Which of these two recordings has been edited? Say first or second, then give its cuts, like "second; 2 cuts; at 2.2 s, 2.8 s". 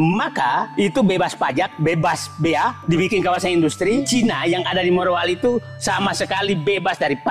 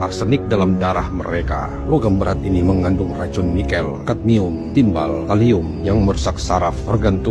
first; 1 cut; at 4.1 s